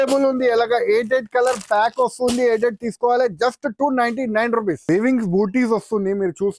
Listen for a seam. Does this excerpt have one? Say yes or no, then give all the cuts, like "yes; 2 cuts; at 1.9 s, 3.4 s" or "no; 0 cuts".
yes; 1 cut; at 4.8 s